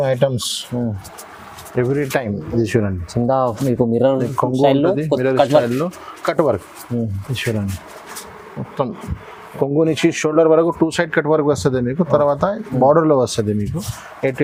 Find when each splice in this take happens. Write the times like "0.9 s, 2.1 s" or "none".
none